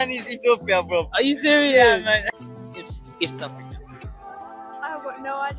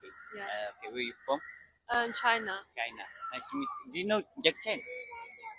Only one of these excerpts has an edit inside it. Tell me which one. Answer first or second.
first